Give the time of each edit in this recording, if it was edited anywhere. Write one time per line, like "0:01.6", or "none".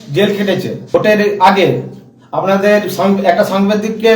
0:00.9